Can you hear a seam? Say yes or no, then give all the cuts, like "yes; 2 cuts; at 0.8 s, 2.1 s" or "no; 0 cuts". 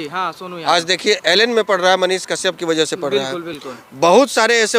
no; 0 cuts